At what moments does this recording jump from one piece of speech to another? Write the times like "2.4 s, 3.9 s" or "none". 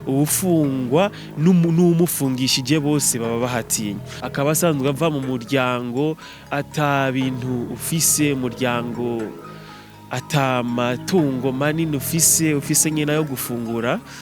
4.3 s